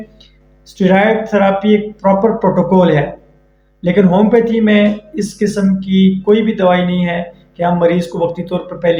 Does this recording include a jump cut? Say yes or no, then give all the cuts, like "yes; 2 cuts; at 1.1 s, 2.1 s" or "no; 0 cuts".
no; 0 cuts